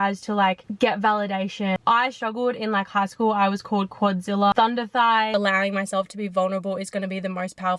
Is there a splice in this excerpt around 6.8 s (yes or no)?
no